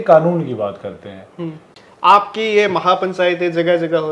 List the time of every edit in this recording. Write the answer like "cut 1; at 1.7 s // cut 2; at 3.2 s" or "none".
cut 1; at 1.7 s